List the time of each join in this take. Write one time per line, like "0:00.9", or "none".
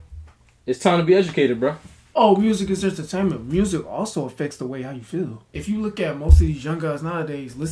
0:02.1
0:05.5